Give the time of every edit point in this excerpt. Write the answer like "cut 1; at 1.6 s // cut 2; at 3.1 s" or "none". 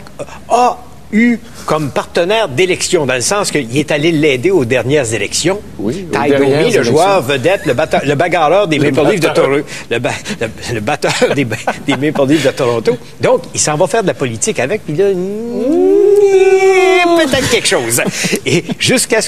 cut 1; at 2.5 s